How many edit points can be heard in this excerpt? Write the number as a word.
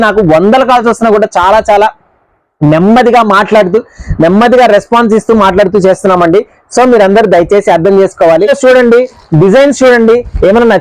one